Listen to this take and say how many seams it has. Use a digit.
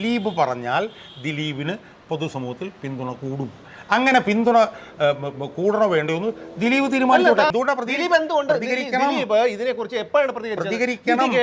1